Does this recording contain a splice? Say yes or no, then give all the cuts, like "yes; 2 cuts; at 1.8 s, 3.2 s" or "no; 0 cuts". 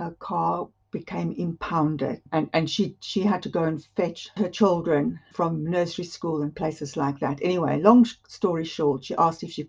no; 0 cuts